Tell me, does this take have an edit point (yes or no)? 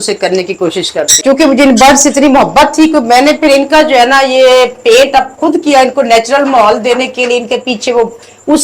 yes